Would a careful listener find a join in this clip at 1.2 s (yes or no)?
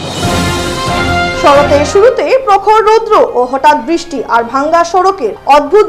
yes